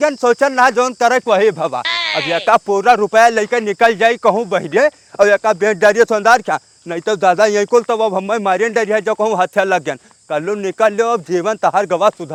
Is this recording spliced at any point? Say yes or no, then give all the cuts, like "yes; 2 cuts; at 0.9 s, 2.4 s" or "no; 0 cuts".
no; 0 cuts